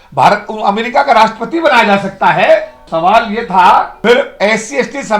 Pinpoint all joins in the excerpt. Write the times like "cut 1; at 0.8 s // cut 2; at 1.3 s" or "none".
cut 1; at 2.8 s // cut 2; at 3.9 s